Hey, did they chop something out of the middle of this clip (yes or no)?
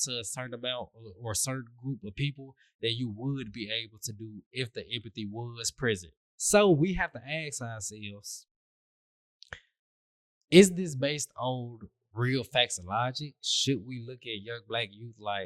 yes